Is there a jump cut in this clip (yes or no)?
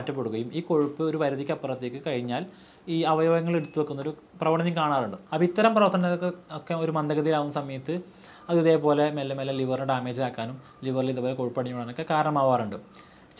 yes